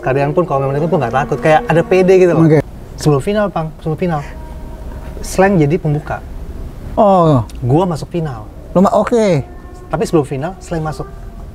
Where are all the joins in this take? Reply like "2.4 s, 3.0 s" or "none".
2.6 s